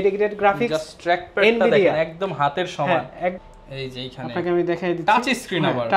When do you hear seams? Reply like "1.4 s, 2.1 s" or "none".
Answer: 3.4 s